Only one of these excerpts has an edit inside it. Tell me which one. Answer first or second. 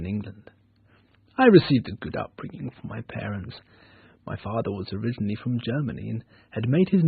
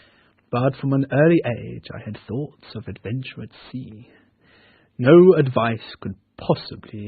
second